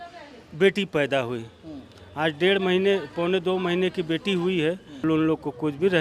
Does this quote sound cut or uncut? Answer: cut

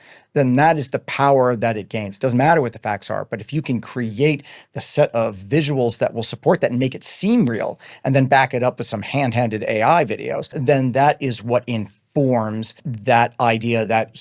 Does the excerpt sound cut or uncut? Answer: cut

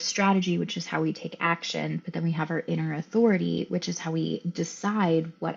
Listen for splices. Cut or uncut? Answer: uncut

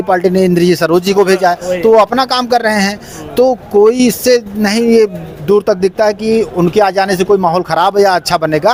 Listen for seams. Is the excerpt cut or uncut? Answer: uncut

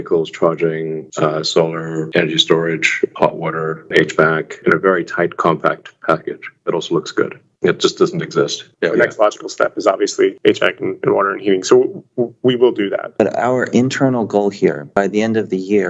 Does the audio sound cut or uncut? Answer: cut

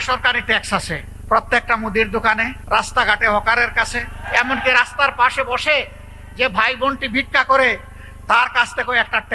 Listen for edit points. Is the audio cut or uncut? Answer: cut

